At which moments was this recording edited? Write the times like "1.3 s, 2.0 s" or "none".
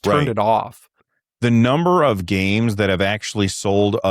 1.1 s